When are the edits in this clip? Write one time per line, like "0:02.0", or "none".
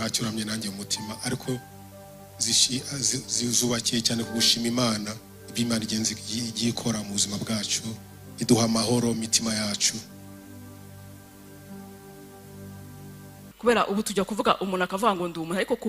0:13.4